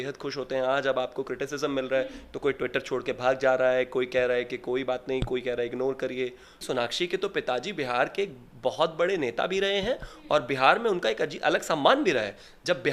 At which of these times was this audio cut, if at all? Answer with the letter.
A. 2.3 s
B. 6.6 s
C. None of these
B